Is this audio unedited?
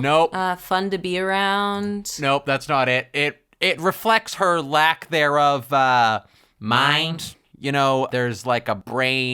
yes; 0 cuts

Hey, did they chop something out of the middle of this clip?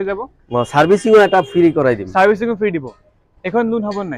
no; 0 cuts

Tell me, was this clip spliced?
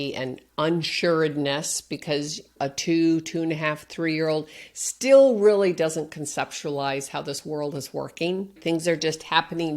yes; 2 cuts; at 2.5 s, 8.6 s

